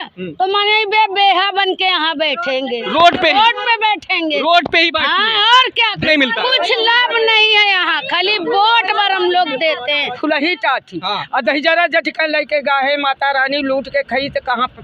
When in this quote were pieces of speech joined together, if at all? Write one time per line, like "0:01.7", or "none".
0:06.0
0:10.2